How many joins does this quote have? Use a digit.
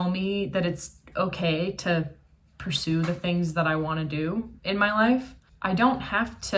1